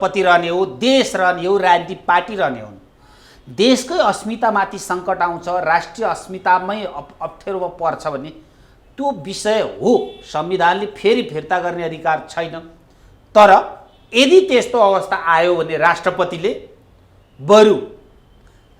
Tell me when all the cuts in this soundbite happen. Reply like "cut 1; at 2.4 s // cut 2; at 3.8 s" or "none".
none